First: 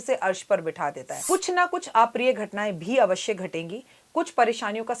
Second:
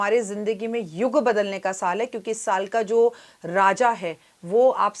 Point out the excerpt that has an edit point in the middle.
first; 1 cut; at 1.1 s

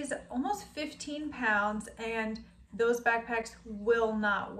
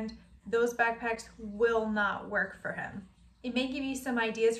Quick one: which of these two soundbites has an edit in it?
second; 1 cut; at 3.4 s

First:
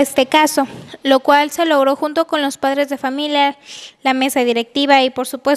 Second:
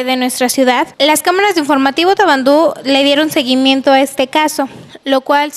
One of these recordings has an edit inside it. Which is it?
second; 1 cut; at 0.9 s

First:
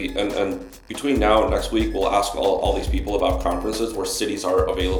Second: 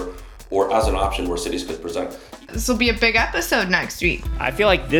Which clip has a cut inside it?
second; 1 cut; at 2.2 s

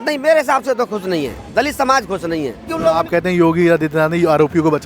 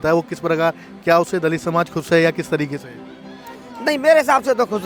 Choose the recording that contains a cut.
first; 1 cut; at 2.7 s

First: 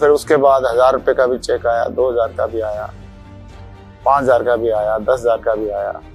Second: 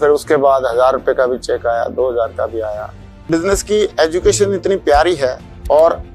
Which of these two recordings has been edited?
second; 1 cut; at 3.2 s

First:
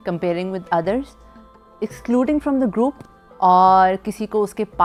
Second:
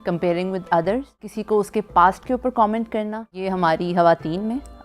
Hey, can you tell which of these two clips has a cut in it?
second; 2 cuts; at 1.3 s, 3.4 s

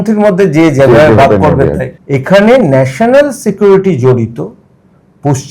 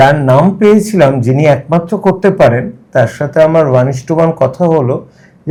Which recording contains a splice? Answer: first; 1 cut; at 1.9 s

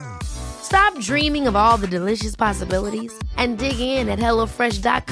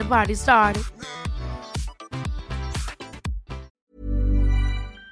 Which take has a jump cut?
second; 1 cut; at 3.7 s

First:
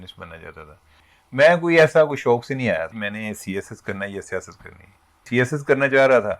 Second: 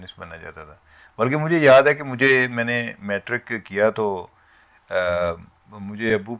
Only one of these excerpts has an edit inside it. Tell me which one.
first; 3 cuts; at 1.0 s, 3.0 s, 5.2 s

